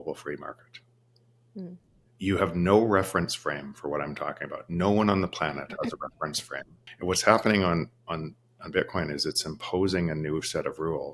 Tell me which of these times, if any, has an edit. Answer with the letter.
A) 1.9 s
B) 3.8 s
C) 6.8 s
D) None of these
C